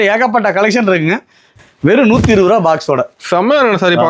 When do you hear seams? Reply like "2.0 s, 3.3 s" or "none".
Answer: 1.5 s